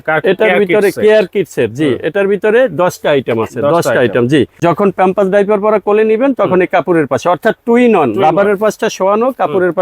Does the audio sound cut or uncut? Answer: cut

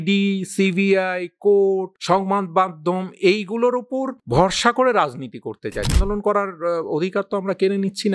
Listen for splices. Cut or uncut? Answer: cut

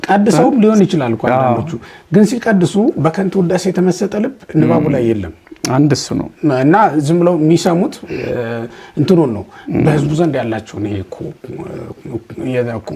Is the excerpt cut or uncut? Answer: uncut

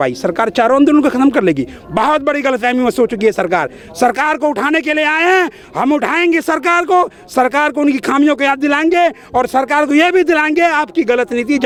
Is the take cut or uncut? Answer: uncut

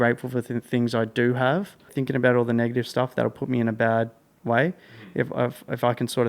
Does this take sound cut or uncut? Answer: cut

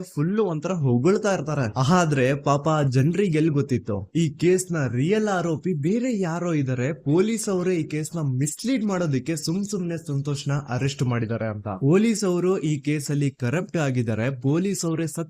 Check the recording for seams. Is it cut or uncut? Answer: cut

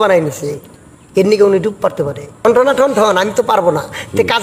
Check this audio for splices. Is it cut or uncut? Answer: cut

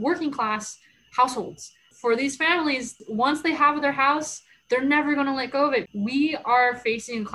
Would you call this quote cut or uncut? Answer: cut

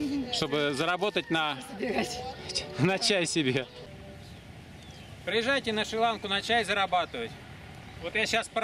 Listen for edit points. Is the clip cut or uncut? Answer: cut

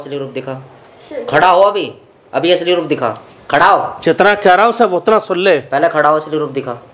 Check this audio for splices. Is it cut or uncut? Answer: uncut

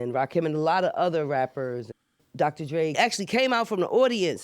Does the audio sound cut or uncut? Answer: cut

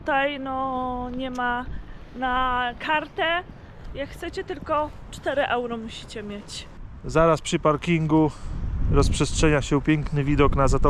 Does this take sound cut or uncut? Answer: uncut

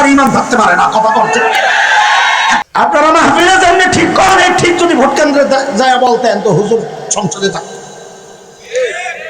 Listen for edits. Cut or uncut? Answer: cut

